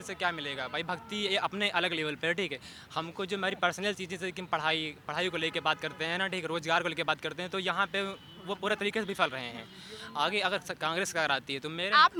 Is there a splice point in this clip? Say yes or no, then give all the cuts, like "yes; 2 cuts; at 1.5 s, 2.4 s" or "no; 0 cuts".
no; 0 cuts